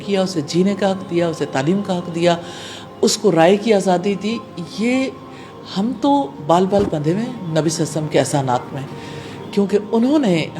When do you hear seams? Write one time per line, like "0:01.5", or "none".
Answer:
none